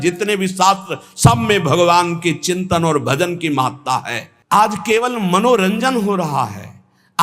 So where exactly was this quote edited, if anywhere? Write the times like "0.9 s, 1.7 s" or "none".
4.3 s